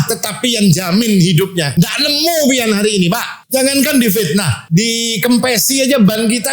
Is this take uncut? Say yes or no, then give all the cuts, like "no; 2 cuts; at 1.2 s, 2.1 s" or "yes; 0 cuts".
no; 3 cuts; at 1.6 s, 3.3 s, 4.6 s